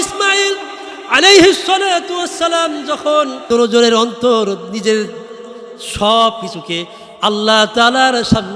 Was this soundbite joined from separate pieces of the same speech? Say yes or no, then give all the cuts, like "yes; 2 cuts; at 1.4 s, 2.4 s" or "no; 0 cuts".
yes; 1 cut; at 3.4 s